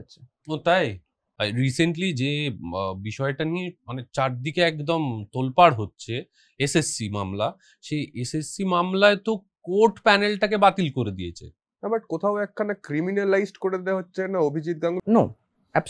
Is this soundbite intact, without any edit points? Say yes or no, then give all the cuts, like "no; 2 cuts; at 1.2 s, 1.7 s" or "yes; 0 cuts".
no; 3 cuts; at 1.2 s, 11.7 s, 15.0 s